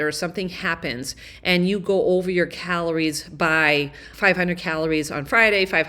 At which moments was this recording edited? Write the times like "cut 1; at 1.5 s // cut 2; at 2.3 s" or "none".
none